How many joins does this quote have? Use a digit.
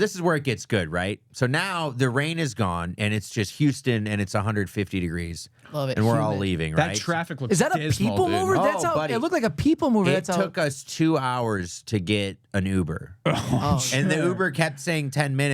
0